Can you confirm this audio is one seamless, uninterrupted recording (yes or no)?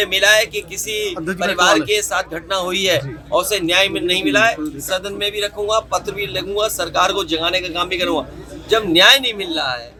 yes